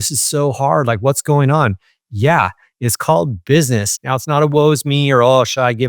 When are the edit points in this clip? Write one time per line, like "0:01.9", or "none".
0:03.9